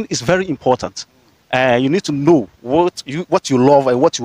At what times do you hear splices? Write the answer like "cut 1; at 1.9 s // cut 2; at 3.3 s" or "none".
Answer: none

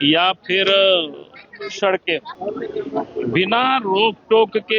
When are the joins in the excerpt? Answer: cut 1; at 2.3 s

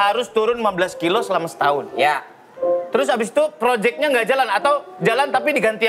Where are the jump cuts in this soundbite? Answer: none

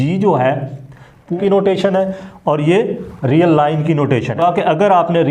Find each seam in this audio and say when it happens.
cut 1; at 1.3 s // cut 2; at 4.4 s

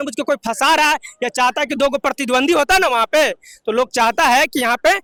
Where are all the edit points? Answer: none

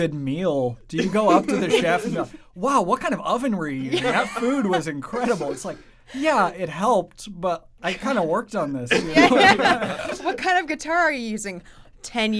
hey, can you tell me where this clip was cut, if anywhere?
none

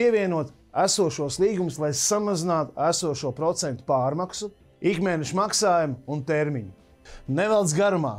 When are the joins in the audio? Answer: none

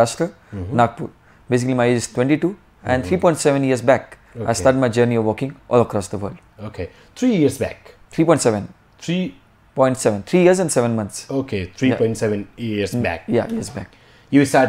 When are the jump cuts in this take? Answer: none

